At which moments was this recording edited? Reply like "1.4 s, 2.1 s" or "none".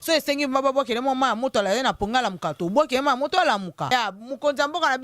3.9 s